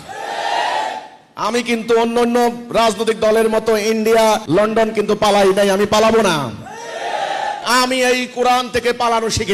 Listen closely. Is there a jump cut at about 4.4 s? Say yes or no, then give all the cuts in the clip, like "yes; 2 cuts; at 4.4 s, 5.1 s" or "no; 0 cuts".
yes; 2 cuts; at 4.4 s, 7.6 s